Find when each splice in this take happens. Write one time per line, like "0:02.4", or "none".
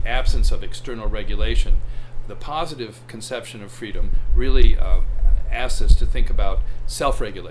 0:04.2